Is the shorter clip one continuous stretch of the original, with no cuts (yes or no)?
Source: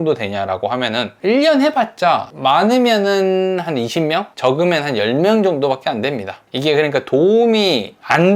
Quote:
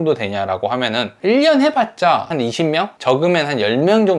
no